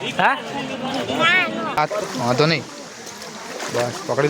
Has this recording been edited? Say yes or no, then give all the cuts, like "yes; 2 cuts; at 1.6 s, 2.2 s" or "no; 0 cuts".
yes; 1 cut; at 1.8 s